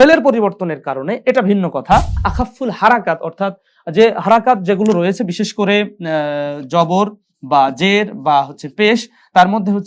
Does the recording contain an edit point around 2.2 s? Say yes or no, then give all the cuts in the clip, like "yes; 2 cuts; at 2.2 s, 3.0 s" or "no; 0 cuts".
yes; 1 cut; at 2.2 s